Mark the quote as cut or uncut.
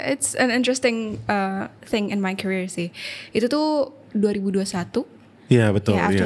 uncut